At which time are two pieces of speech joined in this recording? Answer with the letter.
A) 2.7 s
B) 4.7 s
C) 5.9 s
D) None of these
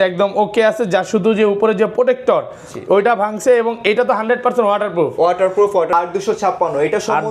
C